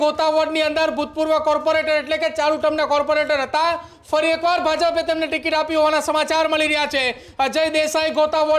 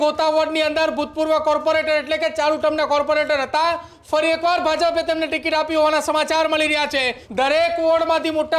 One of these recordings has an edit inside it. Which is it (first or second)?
second